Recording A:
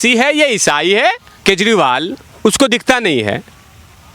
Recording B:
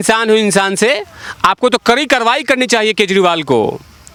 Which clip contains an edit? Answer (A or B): A